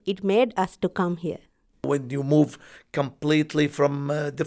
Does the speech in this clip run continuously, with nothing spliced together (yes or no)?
no